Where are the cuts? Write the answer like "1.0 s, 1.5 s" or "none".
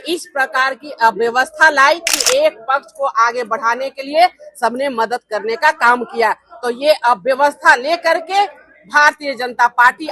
2.2 s